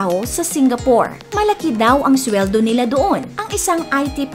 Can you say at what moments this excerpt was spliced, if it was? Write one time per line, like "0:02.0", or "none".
0:01.3
0:03.4